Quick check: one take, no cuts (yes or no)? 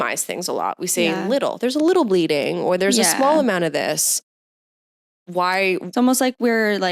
yes